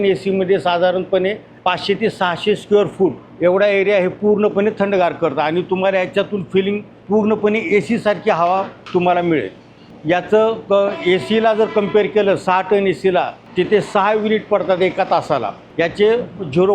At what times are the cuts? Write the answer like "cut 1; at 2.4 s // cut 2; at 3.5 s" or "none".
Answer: cut 1; at 1.5 s // cut 2; at 3.3 s // cut 3; at 6.9 s // cut 4; at 8.8 s // cut 5; at 9.9 s // cut 6; at 13.4 s // cut 7; at 15.6 s

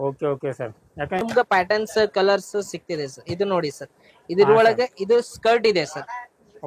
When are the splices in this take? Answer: cut 1; at 1.2 s

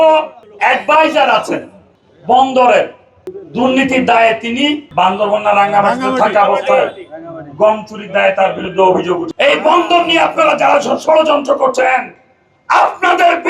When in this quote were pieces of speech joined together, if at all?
cut 1; at 4.8 s // cut 2; at 9.3 s

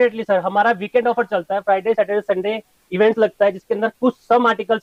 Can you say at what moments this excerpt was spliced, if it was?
none

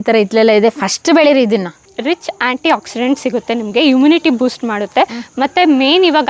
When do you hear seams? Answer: cut 1; at 1.9 s

